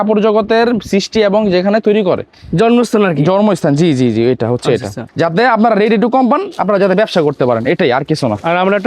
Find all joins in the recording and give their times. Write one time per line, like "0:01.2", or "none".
0:05.1